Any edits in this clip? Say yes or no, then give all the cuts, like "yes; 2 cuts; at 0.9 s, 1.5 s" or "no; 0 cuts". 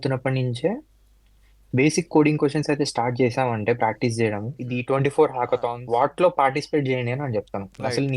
yes; 2 cuts; at 4.6 s, 5.7 s